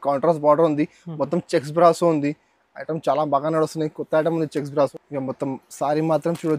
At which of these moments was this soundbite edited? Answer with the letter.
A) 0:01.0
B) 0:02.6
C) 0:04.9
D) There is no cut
C